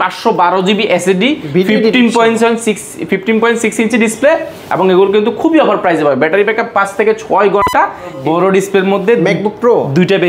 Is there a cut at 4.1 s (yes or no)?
no